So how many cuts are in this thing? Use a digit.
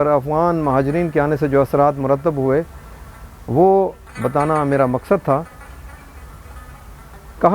0